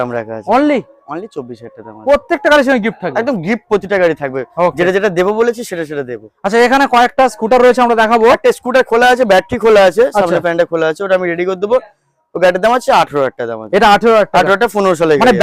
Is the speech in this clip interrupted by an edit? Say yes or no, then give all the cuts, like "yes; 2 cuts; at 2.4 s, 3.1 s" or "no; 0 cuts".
no; 0 cuts